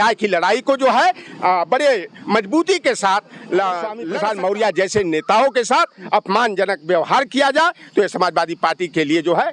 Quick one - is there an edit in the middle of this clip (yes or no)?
yes